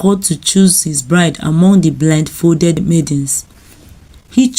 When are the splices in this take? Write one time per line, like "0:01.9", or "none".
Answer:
0:02.8